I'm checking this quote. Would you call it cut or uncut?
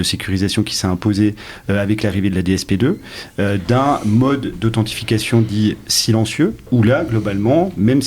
cut